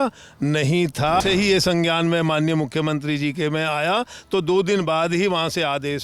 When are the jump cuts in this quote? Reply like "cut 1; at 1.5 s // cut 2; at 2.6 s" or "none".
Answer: cut 1; at 1.2 s